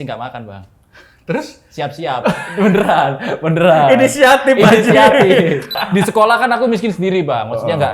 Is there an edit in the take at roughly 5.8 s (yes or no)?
yes